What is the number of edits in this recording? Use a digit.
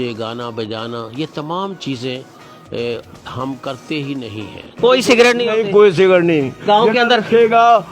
1